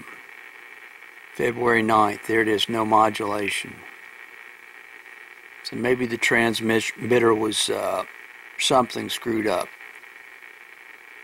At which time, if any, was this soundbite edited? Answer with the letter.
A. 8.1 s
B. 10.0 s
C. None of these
A